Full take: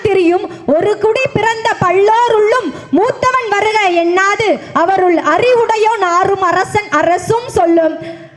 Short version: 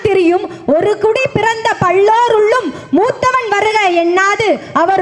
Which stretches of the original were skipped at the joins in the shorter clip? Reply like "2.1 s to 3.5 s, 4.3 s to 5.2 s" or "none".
none

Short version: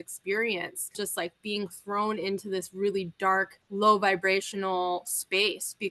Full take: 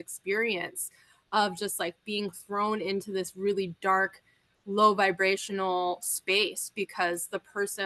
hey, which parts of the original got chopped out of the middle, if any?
0.9 s to 1.6 s, 4.2 s to 4.5 s

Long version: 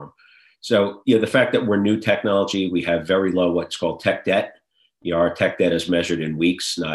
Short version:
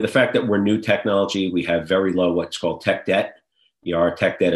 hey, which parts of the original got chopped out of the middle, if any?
none

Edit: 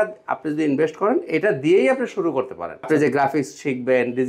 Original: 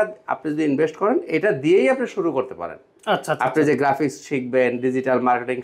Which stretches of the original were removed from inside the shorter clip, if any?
2.8 s to 3.5 s

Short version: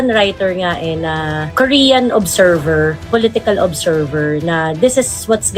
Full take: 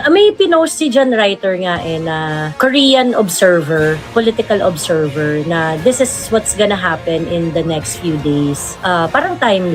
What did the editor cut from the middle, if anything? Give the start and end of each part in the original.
none

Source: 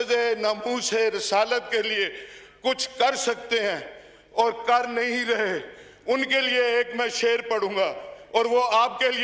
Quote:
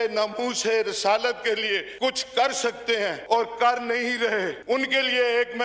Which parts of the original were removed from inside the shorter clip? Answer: 2.2 s to 2.5 s, 3.8 s to 4.3 s, 5.6 s to 6.0 s

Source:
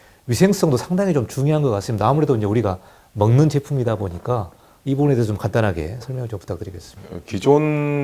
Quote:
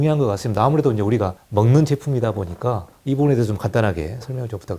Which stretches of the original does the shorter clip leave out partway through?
2.8 s to 3.0 s, 4.5 s to 4.7 s

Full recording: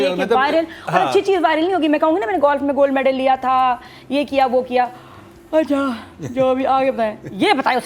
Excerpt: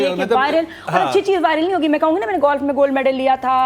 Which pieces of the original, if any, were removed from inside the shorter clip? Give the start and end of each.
none

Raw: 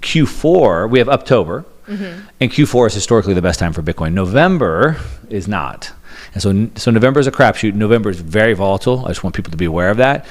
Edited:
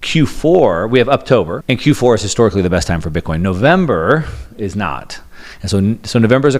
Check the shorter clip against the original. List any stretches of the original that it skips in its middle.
1.6 s to 2.3 s

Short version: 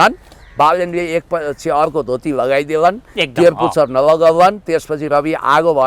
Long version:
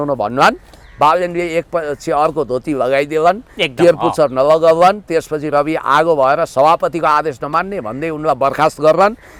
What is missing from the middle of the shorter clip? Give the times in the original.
none

